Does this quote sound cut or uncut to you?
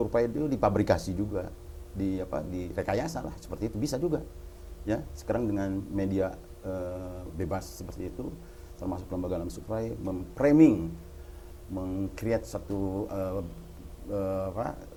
uncut